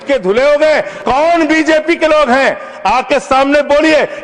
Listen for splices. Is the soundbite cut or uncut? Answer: cut